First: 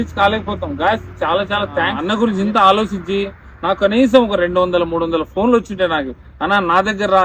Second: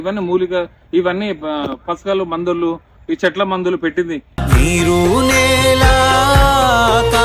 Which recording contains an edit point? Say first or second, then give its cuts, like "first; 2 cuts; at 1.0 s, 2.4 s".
first; 1 cut; at 2.0 s